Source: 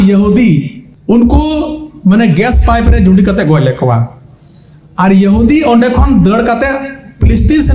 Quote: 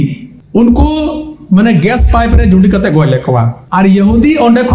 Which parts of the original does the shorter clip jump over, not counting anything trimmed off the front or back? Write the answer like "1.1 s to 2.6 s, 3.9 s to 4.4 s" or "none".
4.1 s to 4.8 s

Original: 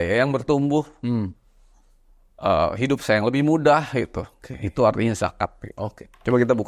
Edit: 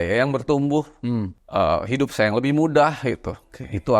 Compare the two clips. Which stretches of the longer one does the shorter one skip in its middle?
1.4 s to 2.3 s

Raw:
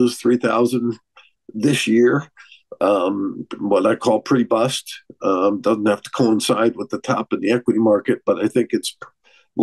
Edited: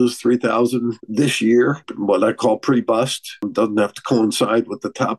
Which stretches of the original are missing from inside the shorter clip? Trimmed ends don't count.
1.0 s to 1.4 s, 2.3 s to 3.5 s, 5.1 s to 5.6 s

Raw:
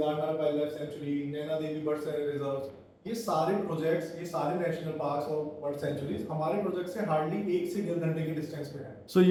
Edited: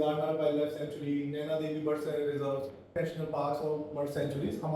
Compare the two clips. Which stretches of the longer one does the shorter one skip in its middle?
2.9 s to 4.6 s

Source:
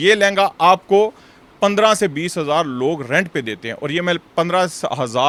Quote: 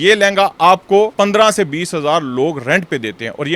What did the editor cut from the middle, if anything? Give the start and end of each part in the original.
1.1 s to 1.6 s

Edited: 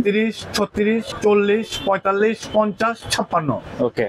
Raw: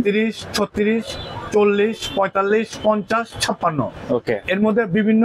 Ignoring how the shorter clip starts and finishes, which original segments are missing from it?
1.1 s to 1.4 s

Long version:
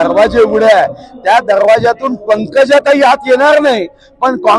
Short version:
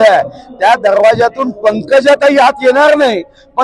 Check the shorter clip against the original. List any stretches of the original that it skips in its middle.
none

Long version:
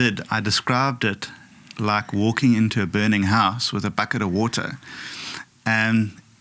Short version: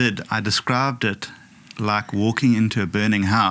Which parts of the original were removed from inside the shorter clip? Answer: none

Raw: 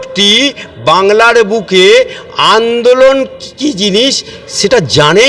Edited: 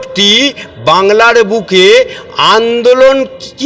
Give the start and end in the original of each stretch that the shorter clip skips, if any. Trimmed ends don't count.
none

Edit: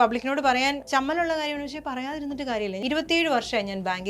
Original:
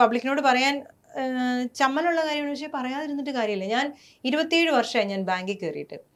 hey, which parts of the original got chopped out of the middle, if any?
0.8 s to 1.7 s, 3.7 s to 4.2 s

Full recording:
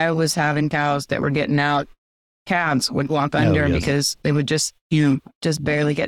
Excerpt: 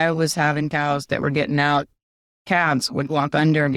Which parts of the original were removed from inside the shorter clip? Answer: none

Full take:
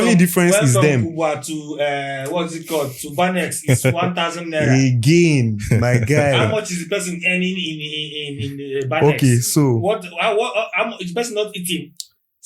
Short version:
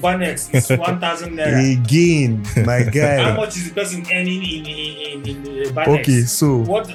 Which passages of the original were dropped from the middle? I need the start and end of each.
none

